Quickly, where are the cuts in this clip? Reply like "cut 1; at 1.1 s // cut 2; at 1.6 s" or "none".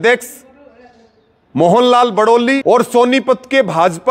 cut 1; at 2.6 s